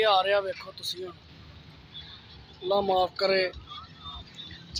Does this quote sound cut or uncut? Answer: uncut